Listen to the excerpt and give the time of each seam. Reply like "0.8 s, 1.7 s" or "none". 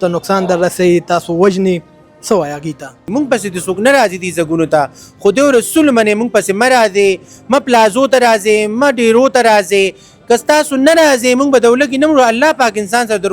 3.1 s